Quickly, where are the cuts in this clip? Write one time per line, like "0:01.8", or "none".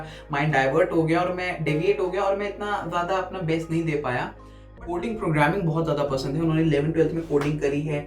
0:04.6

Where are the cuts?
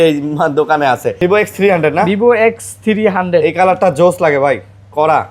0:01.1

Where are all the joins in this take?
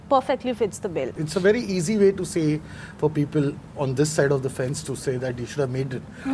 0:01.1

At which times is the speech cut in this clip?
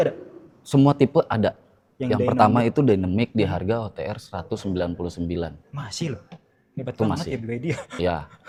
none

